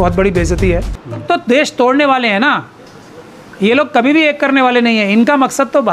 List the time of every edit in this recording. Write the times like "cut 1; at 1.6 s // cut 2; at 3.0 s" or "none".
cut 1; at 1.2 s